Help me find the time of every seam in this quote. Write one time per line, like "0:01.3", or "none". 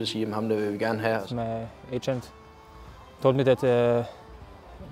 0:01.2